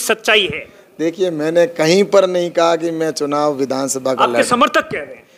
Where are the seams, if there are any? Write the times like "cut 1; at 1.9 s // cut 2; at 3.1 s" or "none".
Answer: none